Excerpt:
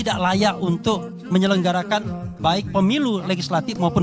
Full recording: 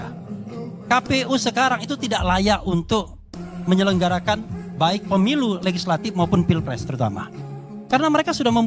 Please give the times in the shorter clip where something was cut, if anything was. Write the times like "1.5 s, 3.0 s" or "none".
1.1 s